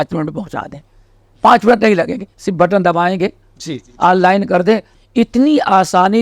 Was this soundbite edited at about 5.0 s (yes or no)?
yes